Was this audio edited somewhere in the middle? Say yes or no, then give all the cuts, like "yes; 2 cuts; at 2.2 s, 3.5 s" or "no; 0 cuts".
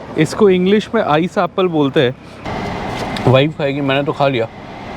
yes; 1 cut; at 2.5 s